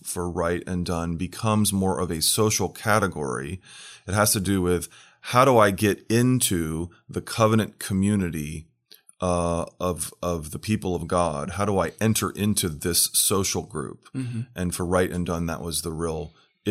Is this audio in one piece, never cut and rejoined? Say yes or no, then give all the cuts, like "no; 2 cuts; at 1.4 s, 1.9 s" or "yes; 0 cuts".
yes; 0 cuts